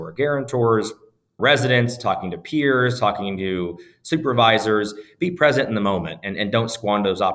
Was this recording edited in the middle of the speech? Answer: no; 0 cuts

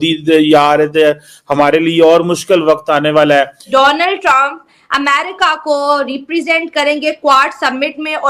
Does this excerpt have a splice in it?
yes; 1 cut; at 3.7 s

